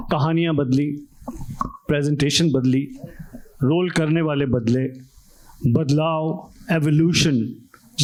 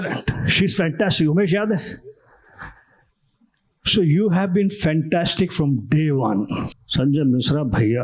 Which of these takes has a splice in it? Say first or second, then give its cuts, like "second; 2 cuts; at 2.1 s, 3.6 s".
second; 1 cut; at 6.8 s